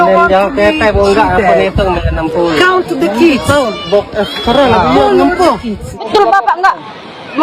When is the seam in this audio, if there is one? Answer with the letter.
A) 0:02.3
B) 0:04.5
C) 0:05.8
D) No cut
C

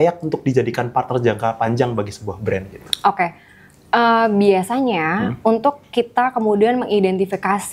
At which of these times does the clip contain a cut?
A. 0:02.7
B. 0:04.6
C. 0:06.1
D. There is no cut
D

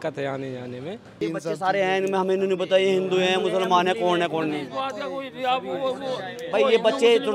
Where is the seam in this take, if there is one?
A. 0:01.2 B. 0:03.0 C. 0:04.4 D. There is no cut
A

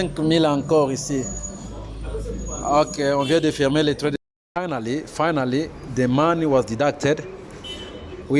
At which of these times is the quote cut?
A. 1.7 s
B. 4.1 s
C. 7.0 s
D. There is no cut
B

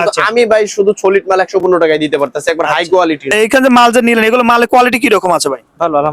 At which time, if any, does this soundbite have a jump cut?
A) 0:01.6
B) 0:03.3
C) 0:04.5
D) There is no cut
B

